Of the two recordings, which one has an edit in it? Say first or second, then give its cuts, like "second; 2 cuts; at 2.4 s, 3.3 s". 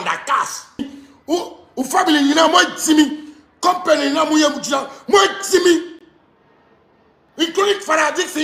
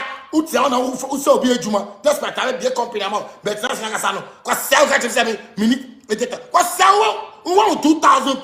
first; 1 cut; at 1.0 s